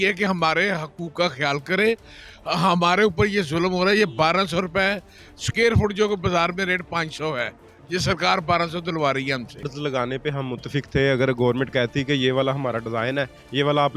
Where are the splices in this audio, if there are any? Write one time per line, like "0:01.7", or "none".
0:09.7